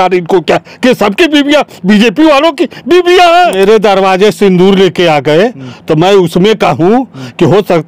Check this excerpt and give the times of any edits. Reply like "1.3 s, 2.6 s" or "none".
3.5 s